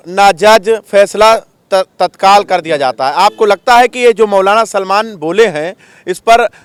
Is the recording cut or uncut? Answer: uncut